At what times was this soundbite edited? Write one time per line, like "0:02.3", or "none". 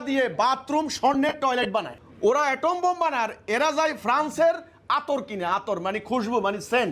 0:02.0